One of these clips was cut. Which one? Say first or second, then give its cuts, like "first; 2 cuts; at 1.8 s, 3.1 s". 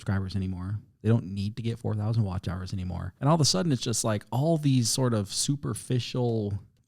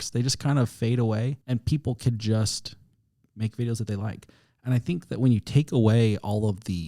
first; 1 cut; at 3.1 s